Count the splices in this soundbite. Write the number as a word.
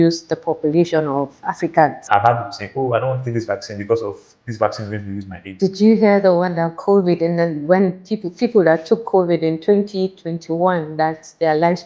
two